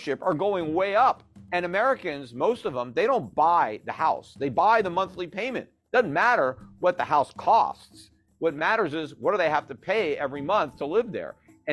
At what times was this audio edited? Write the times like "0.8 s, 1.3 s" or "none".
1.3 s

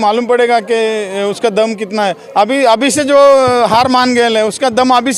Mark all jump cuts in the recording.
none

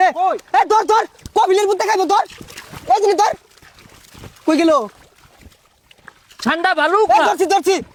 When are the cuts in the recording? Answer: none

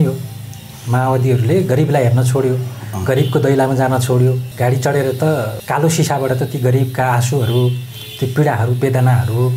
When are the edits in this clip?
4.5 s, 5.6 s

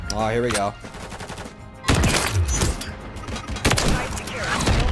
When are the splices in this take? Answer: 0.9 s, 3.4 s

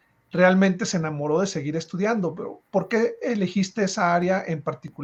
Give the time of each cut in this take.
none

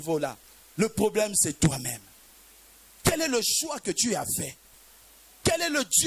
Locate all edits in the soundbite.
none

